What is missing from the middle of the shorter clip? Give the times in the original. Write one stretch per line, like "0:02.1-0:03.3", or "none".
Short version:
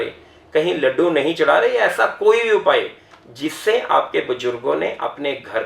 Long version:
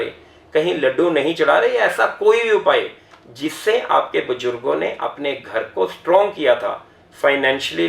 none